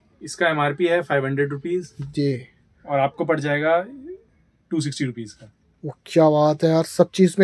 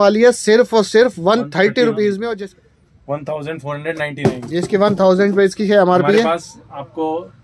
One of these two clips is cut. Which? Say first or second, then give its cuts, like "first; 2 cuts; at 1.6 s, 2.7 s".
second; 1 cut; at 2.4 s